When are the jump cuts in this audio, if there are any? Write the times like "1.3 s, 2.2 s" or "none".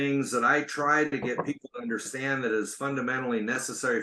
none